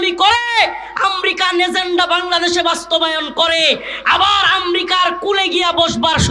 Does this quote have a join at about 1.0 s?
no; 0 cuts

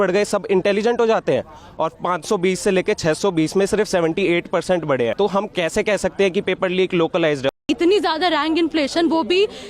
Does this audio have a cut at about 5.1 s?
yes; 2 cuts; at 5.1 s, 7.6 s

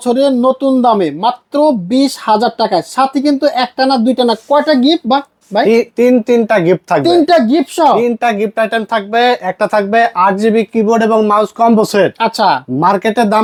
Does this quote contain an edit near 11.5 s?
no; 0 cuts

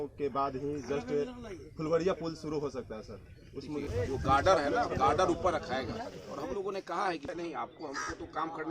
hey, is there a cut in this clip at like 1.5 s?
no; 2 cuts; at 3.9 s, 7.3 s

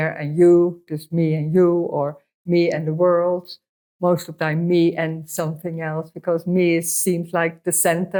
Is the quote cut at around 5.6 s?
no; 0 cuts

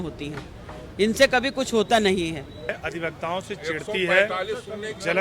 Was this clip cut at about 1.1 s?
no; 1 cut; at 2.7 s

